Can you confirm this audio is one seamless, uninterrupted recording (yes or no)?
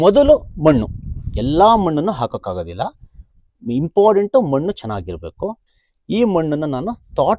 yes